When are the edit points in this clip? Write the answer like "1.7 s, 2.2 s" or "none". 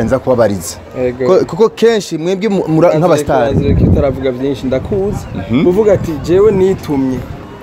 none